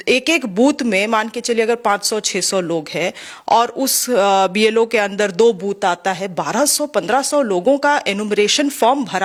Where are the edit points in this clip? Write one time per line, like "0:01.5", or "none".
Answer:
none